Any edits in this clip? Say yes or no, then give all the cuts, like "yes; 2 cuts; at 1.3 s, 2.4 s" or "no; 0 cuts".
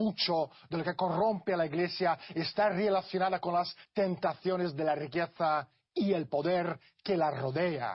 no; 0 cuts